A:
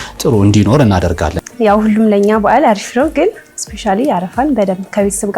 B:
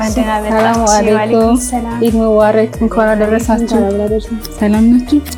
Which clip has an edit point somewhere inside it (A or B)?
A